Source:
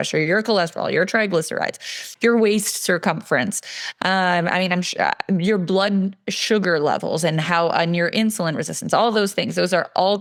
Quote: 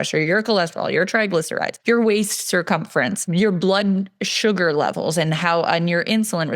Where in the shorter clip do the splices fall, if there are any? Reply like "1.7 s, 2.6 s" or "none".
1.7 s, 3.3 s